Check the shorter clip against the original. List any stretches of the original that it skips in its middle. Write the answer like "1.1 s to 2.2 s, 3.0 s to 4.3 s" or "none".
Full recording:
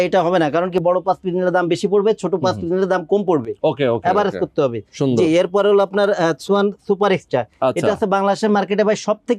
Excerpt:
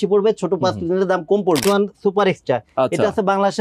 3.4 s to 6.5 s